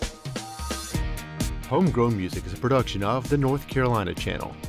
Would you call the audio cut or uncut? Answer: cut